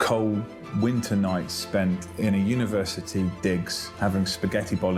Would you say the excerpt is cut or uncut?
uncut